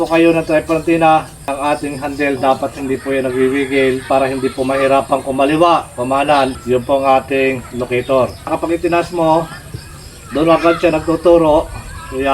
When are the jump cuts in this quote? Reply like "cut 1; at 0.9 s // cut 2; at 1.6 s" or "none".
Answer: cut 1; at 1.5 s // cut 2; at 4.0 s // cut 3; at 6.6 s // cut 4; at 8.5 s